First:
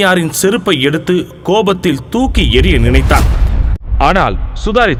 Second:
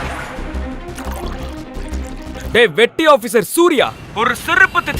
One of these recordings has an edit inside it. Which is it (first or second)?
second